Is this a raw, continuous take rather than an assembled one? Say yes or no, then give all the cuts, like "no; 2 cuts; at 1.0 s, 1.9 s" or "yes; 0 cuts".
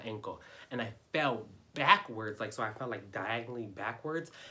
yes; 0 cuts